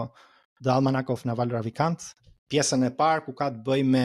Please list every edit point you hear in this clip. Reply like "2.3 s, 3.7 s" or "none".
none